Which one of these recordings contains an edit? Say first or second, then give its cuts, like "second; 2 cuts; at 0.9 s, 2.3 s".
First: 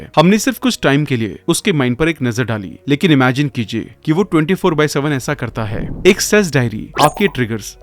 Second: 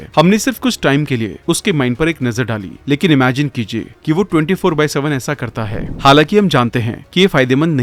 first; 1 cut; at 5.8 s